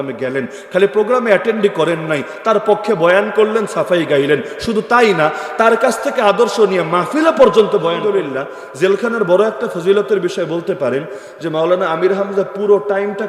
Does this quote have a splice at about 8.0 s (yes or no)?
yes